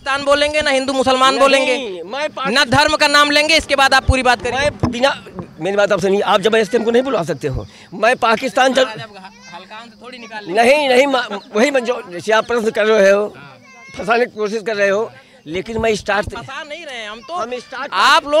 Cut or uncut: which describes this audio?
uncut